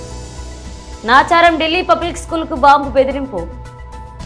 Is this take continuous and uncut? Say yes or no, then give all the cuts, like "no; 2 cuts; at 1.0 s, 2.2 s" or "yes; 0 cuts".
yes; 0 cuts